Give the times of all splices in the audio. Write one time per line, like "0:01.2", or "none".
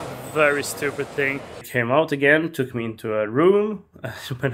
0:01.7